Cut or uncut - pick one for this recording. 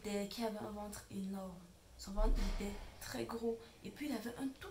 uncut